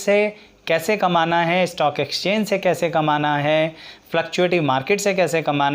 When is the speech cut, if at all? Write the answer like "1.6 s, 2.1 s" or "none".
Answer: none